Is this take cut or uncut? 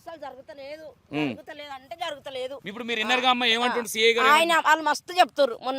cut